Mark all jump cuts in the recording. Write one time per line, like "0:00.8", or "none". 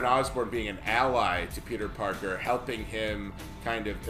none